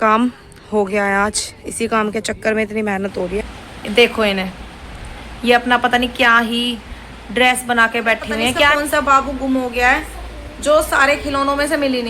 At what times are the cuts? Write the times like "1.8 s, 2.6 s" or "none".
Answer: 3.5 s, 8.7 s